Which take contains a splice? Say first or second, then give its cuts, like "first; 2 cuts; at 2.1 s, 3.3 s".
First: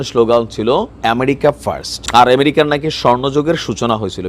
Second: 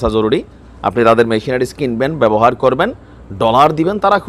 first; 2 cuts; at 0.9 s, 1.9 s